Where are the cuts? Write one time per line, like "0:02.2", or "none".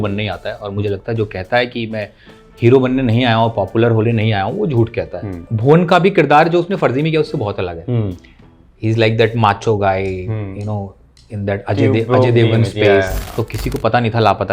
0:05.5
0:13.2